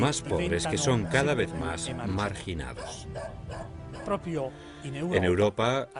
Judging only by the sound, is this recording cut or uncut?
uncut